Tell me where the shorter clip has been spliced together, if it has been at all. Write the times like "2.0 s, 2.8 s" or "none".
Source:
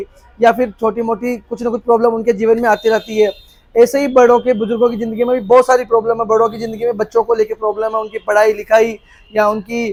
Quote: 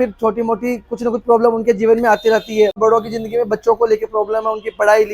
2.8 s